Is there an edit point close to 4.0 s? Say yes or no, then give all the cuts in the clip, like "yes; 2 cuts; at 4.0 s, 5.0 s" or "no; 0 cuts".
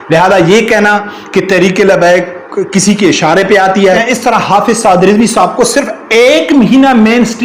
yes; 1 cut; at 4.0 s